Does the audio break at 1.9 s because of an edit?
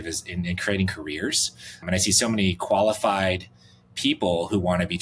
yes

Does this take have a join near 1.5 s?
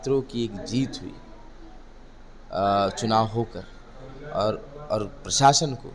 no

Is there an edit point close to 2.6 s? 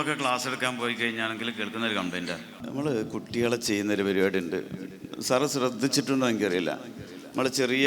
yes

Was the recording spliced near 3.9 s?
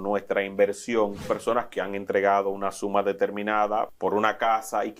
yes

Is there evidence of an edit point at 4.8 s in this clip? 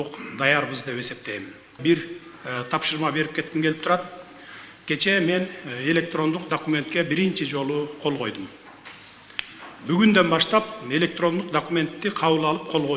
no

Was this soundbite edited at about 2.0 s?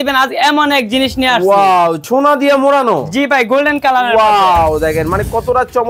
yes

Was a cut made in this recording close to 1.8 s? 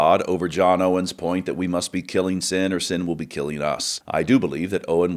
no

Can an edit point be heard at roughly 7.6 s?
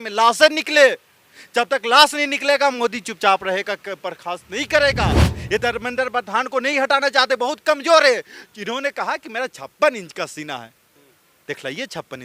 no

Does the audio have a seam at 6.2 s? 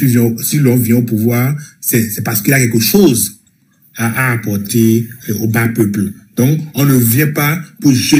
no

